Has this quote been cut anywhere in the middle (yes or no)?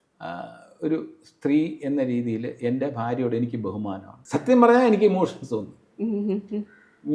yes